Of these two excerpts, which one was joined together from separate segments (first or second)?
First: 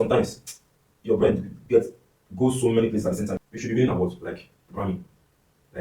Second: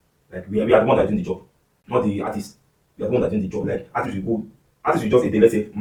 first